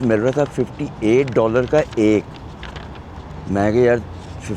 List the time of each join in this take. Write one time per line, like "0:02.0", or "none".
none